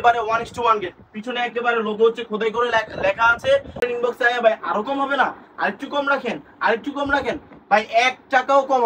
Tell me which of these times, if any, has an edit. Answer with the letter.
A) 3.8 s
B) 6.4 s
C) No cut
A